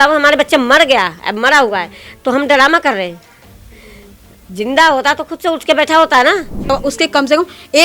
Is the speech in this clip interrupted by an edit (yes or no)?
yes